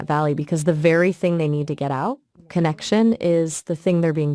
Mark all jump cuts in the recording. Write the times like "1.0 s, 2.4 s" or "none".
none